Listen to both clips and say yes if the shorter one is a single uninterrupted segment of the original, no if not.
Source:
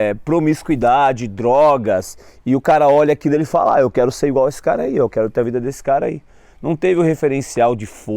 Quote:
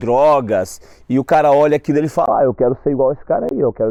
yes